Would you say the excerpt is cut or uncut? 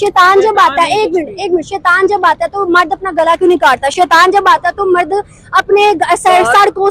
uncut